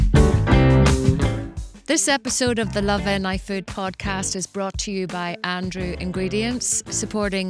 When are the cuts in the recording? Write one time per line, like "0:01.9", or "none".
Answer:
0:01.3